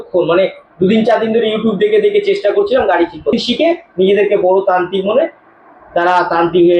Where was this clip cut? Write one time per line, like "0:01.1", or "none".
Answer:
0:03.3